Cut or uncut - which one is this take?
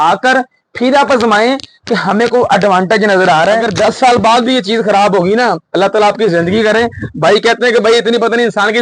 cut